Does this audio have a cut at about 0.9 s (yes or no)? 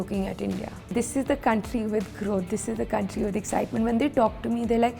yes